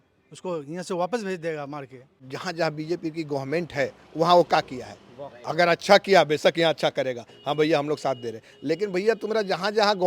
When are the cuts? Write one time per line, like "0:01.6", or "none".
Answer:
0:02.3